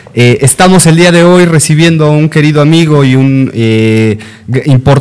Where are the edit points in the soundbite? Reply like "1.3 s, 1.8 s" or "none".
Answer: none